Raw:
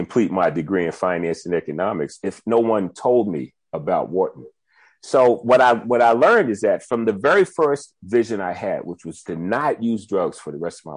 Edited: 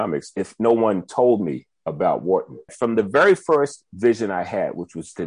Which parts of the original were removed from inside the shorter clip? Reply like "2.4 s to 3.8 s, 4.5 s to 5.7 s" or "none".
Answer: 4.7 s to 6.9 s